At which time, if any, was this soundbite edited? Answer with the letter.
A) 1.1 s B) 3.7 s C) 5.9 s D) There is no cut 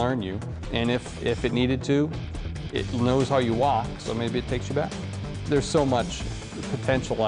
C